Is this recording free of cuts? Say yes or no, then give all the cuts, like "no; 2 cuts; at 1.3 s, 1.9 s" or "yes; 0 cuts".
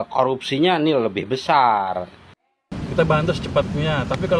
no; 1 cut; at 2.4 s